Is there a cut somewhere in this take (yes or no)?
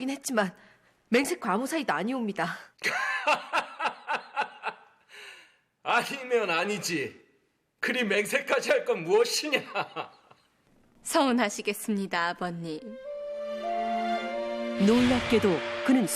no